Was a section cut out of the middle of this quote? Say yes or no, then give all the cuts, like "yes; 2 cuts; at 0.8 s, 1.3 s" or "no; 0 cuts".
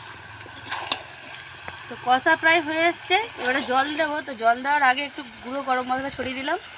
no; 0 cuts